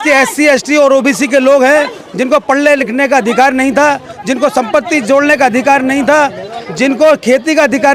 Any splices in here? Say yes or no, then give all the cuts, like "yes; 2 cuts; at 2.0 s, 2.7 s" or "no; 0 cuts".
no; 0 cuts